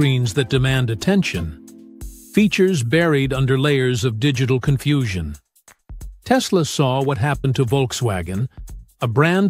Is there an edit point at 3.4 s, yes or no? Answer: no